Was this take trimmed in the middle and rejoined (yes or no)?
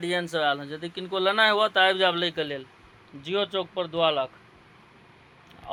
no